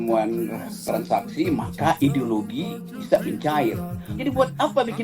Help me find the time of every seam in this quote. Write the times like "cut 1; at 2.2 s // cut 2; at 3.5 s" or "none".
cut 1; at 4.1 s